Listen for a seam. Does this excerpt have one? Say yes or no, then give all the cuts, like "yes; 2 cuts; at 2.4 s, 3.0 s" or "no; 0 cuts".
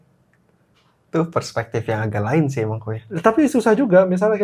no; 0 cuts